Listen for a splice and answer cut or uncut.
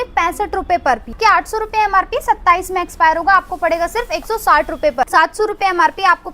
cut